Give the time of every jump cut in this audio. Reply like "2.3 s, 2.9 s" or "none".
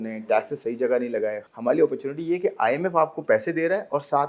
1.5 s